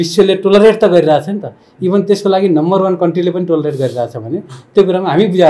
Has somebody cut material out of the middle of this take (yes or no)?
no